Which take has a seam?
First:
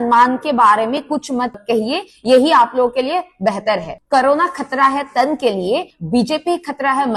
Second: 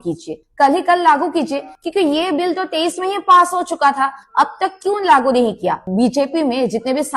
second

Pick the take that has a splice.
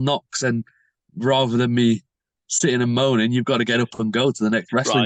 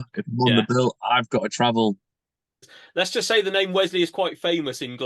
second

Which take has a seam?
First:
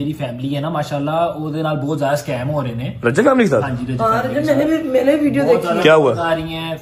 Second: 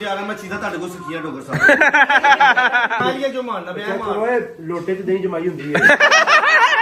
second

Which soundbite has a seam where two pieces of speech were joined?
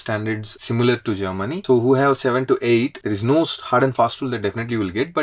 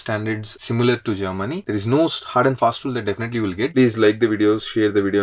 second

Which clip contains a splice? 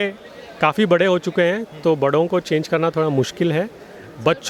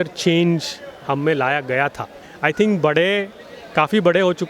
second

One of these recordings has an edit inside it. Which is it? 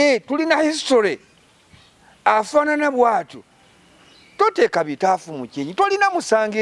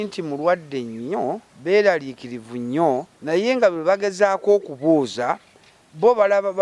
second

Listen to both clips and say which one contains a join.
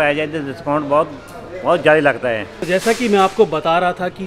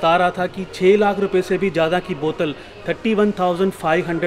first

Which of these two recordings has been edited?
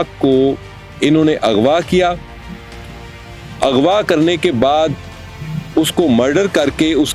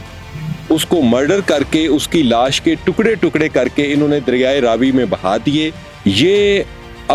second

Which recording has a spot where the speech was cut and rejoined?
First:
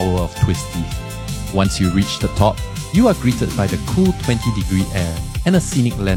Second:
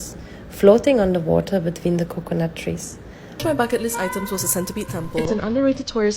second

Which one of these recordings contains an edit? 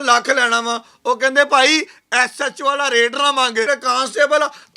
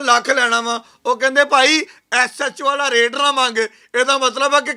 first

